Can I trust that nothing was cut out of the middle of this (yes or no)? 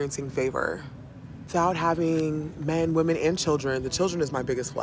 no